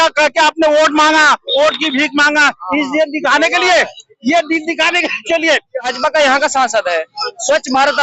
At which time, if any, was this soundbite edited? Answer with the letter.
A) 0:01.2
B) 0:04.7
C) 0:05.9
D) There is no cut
C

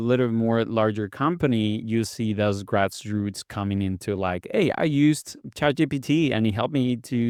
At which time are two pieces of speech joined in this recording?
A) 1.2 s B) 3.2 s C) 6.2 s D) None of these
D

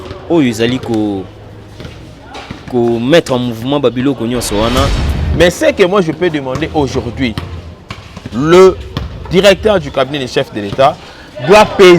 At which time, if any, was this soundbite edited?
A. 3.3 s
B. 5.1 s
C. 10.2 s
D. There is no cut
B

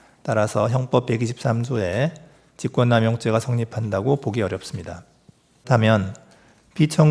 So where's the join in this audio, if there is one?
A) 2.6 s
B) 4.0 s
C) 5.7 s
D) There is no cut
C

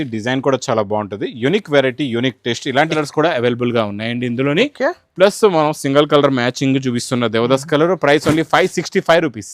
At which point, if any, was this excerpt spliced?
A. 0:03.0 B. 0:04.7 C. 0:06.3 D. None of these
A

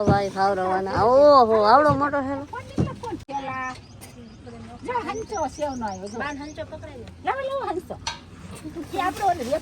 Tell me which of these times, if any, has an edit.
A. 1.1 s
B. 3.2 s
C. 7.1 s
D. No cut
B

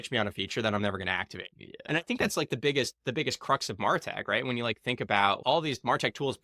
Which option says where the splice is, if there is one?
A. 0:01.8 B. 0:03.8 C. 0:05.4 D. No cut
C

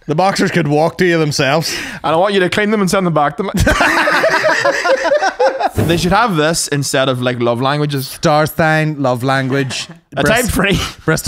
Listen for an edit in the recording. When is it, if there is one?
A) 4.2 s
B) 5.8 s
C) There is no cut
B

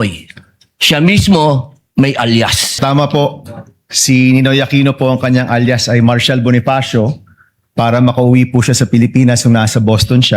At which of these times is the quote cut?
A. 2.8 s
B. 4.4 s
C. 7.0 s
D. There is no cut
A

